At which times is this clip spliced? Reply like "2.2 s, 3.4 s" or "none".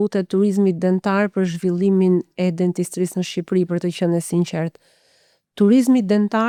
none

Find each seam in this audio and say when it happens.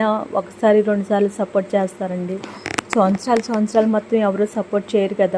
none

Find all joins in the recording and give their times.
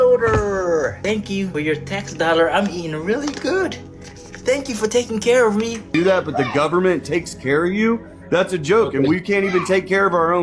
1.2 s, 5.8 s

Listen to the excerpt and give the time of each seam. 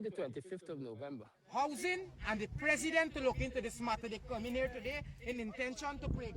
1.4 s

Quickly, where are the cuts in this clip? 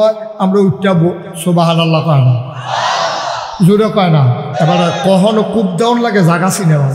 4.4 s

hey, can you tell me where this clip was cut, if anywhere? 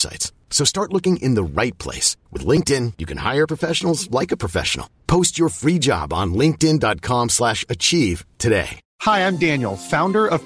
8.8 s

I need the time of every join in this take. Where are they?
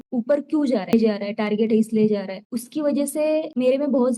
0.9 s

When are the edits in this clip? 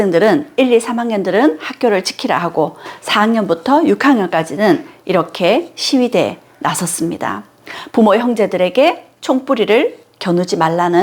none

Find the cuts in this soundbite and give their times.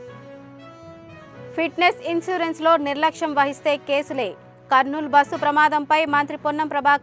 1.0 s

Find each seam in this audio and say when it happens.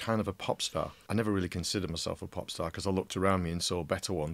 1.0 s

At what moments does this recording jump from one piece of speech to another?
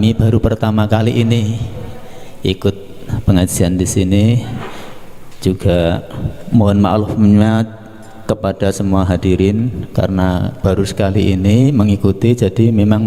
none

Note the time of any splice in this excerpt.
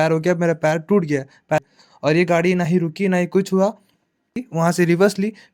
1.6 s, 4.4 s

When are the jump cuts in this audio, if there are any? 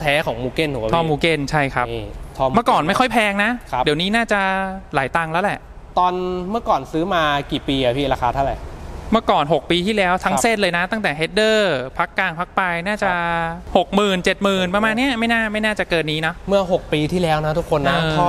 none

